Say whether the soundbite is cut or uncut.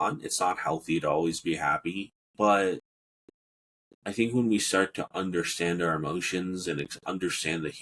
uncut